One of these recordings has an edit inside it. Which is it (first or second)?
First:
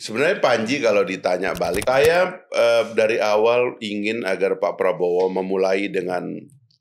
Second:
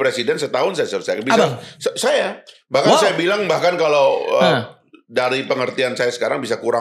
first